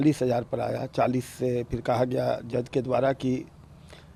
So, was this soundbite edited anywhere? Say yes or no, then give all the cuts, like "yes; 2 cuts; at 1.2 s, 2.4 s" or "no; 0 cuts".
no; 0 cuts